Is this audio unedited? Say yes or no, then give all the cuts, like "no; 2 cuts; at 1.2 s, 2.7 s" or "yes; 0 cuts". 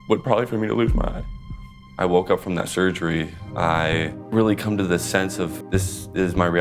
no; 4 cuts; at 1.8 s, 3.4 s, 4.2 s, 5.6 s